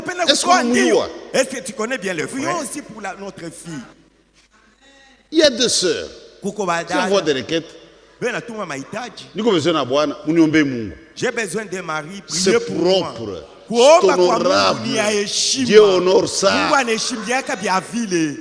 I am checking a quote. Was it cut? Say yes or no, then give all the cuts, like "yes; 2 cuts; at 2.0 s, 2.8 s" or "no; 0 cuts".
yes; 1 cut; at 2.3 s